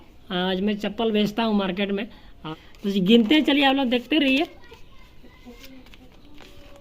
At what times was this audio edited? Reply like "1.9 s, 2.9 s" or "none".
2.3 s